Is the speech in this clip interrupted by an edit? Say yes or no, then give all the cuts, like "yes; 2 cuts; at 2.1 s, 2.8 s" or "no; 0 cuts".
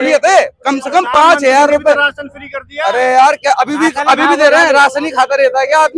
no; 0 cuts